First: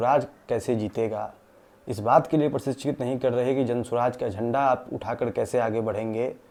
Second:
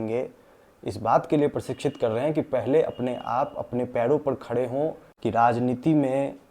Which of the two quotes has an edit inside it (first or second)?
second